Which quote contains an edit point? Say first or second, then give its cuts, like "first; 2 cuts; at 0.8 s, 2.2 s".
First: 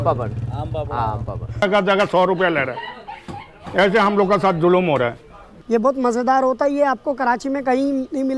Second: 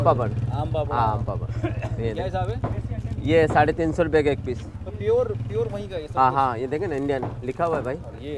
first; 2 cuts; at 1.6 s, 5.5 s